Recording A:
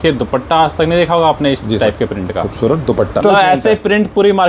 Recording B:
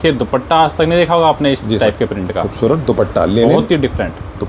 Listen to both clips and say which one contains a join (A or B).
A